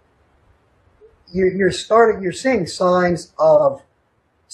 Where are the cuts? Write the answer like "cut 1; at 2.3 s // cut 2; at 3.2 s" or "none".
cut 1; at 3.3 s

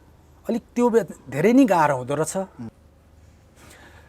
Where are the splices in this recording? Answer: cut 1; at 2.7 s

